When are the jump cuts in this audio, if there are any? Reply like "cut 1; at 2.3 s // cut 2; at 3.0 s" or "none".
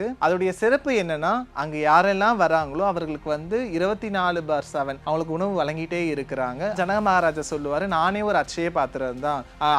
cut 1; at 5.0 s // cut 2; at 6.8 s